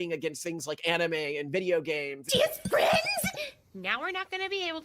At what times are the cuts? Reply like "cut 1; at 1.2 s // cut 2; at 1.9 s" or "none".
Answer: cut 1; at 2.1 s